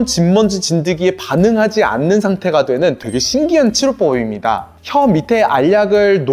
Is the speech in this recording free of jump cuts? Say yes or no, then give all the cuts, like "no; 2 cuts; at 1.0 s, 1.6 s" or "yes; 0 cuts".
yes; 0 cuts